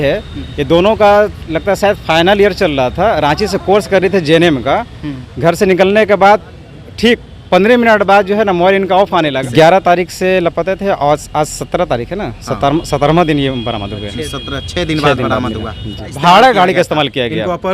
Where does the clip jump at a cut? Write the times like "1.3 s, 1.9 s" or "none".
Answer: 9.4 s, 16.1 s